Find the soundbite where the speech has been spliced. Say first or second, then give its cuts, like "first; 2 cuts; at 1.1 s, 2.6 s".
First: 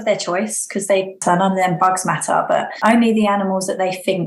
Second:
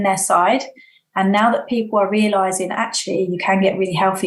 first; 2 cuts; at 1.2 s, 2.7 s